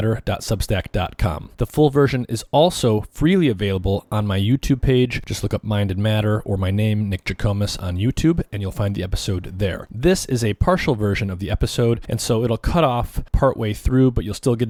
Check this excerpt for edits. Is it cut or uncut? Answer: uncut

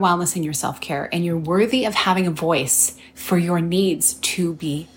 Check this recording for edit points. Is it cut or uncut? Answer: uncut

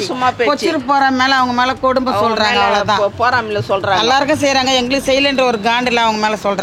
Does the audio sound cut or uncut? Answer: uncut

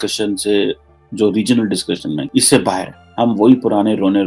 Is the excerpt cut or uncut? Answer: cut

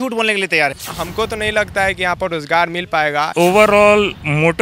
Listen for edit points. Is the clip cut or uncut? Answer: cut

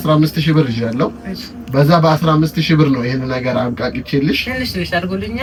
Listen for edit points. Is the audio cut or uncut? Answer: uncut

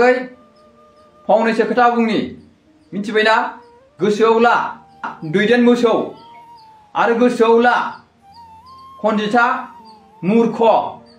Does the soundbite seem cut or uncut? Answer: uncut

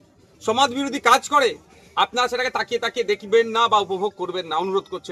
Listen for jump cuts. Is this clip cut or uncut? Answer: uncut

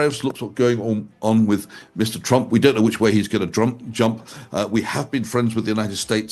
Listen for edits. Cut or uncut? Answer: uncut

